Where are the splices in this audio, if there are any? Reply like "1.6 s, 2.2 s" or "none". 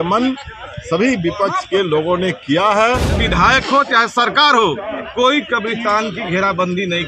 3.2 s